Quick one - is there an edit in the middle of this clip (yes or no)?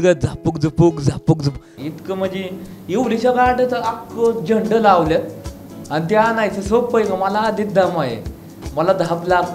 yes